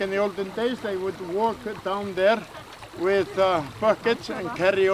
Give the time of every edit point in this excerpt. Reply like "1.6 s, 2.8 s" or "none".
none